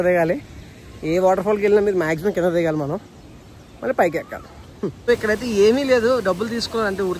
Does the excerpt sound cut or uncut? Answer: cut